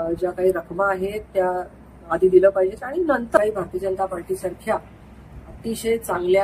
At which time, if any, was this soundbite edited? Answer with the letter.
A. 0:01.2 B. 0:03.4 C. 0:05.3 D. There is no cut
B